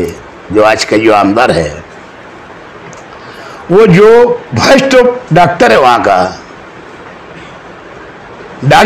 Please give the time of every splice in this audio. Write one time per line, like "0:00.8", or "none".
none